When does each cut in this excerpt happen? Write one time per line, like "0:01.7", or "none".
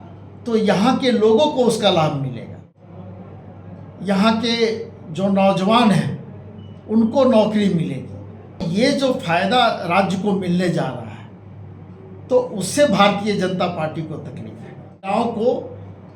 0:02.7
0:08.7
0:15.1